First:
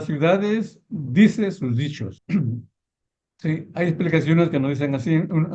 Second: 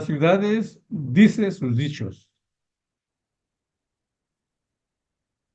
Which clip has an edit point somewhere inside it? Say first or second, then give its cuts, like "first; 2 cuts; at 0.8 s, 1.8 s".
first; 1 cut; at 2.2 s